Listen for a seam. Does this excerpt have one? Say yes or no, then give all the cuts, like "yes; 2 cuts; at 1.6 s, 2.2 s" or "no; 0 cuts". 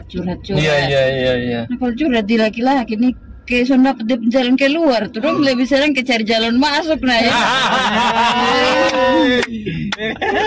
no; 0 cuts